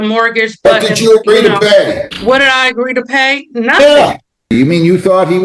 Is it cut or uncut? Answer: cut